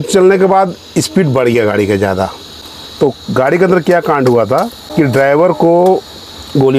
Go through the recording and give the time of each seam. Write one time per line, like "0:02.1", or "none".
0:02.5
0:04.8